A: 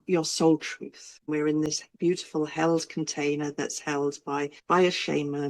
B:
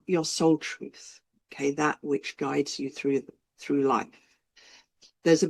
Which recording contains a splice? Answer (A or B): A